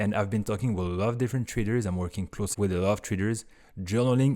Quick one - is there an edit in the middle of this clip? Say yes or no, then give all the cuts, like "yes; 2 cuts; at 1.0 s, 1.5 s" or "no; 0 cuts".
no; 0 cuts